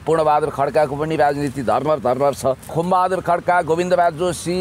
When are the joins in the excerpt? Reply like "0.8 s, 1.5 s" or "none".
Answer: 2.8 s